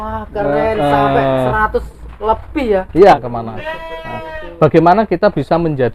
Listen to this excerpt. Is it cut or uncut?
cut